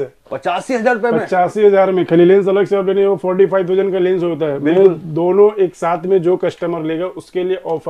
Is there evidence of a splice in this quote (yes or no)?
no